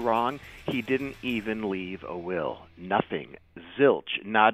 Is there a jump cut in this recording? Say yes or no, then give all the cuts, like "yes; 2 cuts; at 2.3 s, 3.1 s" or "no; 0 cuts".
no; 0 cuts